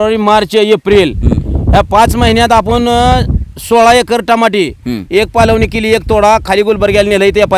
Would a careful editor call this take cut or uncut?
uncut